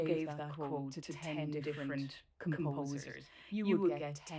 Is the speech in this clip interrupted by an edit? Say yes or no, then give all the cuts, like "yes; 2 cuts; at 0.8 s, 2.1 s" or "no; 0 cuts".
yes; 1 cut; at 1.0 s